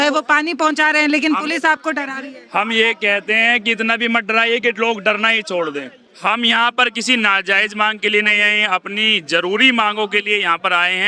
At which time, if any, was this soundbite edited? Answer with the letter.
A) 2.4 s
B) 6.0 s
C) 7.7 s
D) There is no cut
B